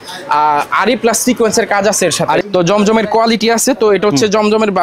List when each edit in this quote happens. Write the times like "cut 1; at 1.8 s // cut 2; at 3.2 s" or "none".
cut 1; at 2.4 s